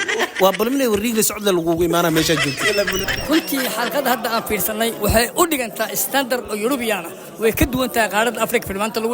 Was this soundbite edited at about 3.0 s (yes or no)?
yes